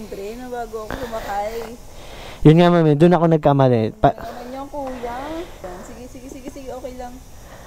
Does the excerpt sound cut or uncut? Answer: cut